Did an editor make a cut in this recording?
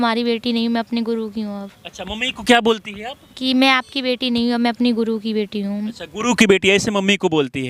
no; 0 cuts

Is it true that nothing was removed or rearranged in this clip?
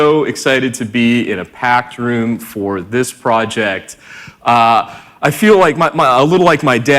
no; 1 cut; at 5.2 s

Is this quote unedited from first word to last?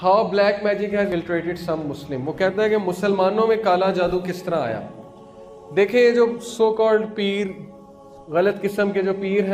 yes; 0 cuts

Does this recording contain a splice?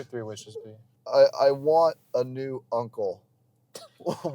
yes; 1 cut; at 0.9 s

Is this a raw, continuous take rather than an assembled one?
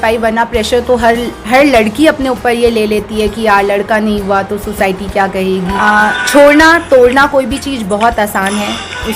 no; 1 cut; at 5.7 s

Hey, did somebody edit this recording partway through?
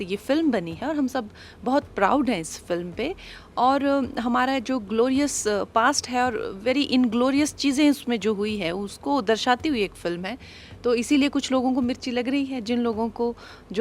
no; 0 cuts

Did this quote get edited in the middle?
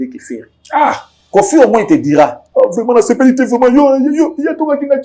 yes; 1 cut; at 1.1 s

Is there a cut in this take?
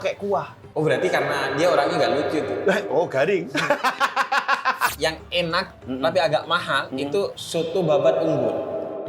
yes; 1 cut; at 4.9 s

